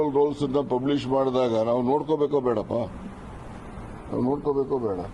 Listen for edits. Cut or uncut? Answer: cut